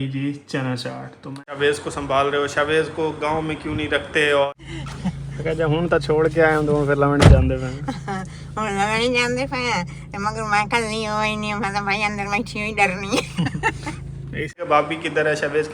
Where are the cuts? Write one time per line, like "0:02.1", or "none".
0:01.5
0:04.5
0:14.6